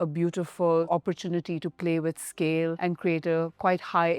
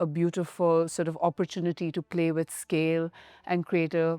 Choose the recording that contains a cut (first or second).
first